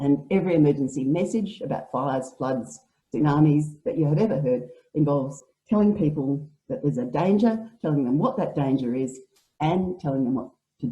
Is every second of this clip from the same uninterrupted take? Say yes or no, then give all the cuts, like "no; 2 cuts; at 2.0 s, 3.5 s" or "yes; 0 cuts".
no; 1 cut; at 5.4 s